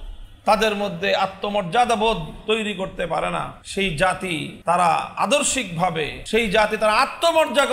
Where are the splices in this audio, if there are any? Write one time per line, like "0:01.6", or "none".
0:03.6
0:04.5
0:06.2